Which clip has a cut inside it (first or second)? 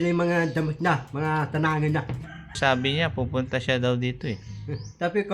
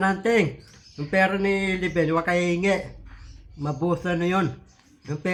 first